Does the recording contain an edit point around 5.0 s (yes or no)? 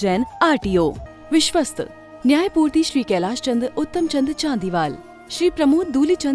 no